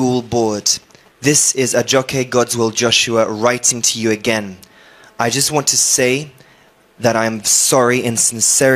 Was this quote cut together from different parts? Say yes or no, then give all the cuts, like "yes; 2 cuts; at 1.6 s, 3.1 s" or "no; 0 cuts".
no; 0 cuts